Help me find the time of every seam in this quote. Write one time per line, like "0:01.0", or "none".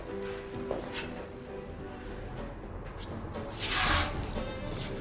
none